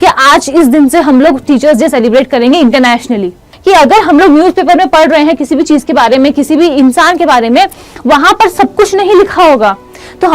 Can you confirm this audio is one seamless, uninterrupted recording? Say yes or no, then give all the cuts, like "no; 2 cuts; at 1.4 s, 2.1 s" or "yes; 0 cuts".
no; 1 cut; at 3.5 s